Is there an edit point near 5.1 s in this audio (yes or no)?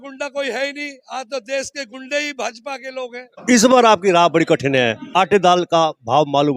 yes